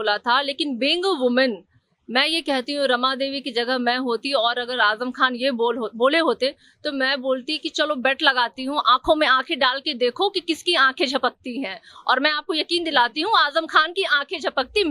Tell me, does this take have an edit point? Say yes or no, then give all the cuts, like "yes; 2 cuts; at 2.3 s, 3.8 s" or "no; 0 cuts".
no; 0 cuts